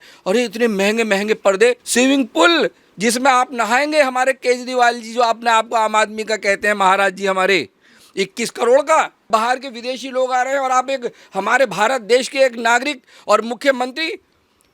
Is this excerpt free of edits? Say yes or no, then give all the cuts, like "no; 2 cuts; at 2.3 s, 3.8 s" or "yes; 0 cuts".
no; 2 cuts; at 1.8 s, 9.3 s